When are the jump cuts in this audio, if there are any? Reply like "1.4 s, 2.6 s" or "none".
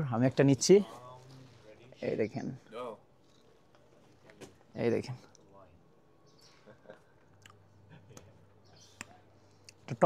none